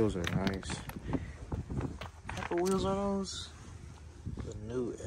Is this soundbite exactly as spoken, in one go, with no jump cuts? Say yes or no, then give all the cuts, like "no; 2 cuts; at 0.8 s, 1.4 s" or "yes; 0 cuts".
yes; 0 cuts